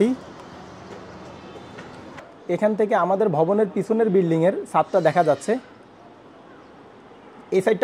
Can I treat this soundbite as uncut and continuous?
no; 1 cut; at 2.2 s

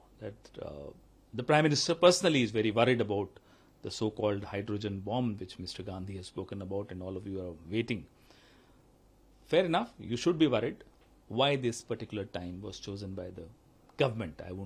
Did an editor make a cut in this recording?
yes; 1 cut; at 10.9 s

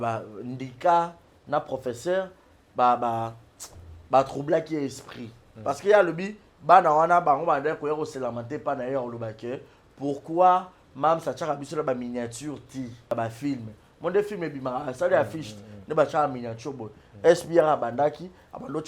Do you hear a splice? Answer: yes; 2 cuts; at 5.5 s, 13.1 s

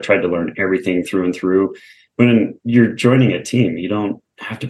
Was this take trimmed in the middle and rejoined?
no; 0 cuts

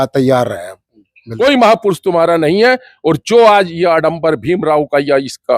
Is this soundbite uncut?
no; 1 cut; at 1.2 s

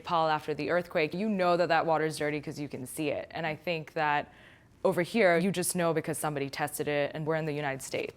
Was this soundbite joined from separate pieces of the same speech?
yes; 3 cuts; at 1.1 s, 5.4 s, 7.3 s

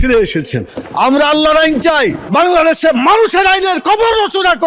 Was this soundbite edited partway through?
yes; 1 cut; at 2.2 s

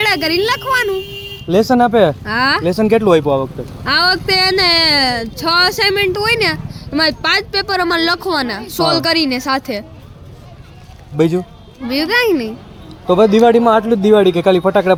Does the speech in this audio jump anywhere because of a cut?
no; 0 cuts

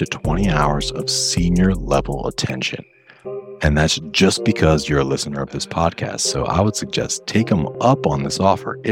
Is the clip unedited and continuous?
yes; 0 cuts

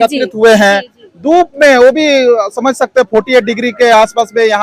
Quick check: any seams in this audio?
no; 0 cuts

